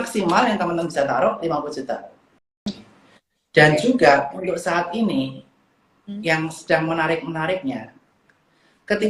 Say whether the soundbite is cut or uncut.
cut